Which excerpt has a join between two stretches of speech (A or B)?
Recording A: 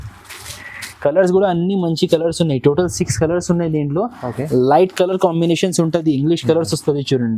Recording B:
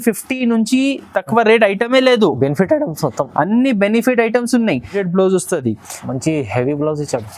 B